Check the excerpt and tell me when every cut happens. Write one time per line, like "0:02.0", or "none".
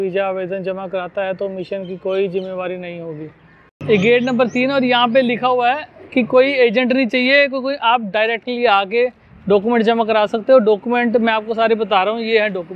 none